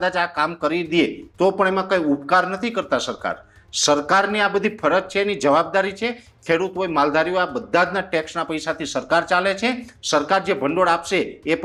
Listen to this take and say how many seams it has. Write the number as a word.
zero